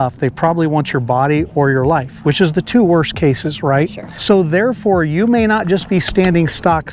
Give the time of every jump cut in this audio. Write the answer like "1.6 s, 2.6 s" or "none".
4.1 s